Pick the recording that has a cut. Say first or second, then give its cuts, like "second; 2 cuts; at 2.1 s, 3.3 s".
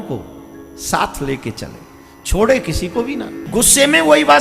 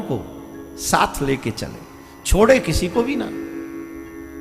first; 1 cut; at 3.4 s